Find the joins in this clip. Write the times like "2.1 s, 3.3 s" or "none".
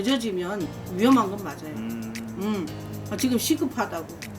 2.8 s